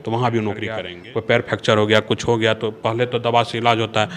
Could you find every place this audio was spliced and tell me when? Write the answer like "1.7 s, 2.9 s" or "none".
0.9 s